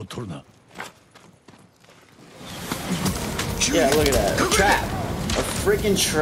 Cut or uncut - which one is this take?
uncut